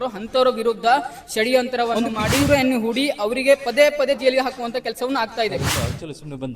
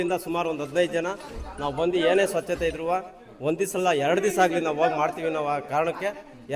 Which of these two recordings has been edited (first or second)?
first